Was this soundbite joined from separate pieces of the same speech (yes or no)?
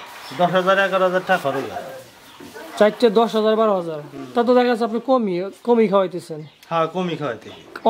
no